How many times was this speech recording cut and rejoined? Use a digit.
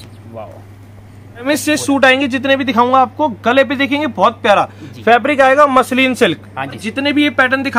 2